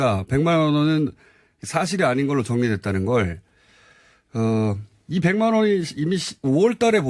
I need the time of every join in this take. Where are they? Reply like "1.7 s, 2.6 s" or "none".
none